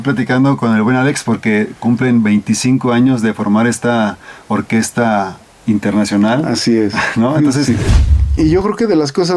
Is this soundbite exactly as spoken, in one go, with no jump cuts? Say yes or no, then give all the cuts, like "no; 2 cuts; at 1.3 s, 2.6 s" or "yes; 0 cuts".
no; 1 cut; at 8.0 s